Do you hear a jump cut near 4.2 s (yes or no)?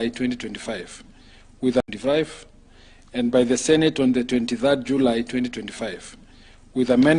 no